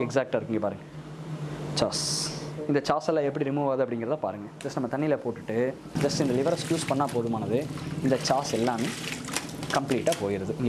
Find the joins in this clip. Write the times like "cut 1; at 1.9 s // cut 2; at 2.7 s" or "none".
cut 1; at 2.5 s // cut 2; at 6.0 s